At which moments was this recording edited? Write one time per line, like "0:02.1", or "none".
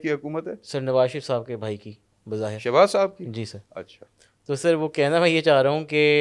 none